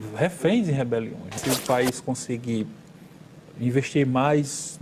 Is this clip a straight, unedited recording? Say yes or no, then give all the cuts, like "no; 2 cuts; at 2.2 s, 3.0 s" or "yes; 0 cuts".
no; 1 cut; at 1.3 s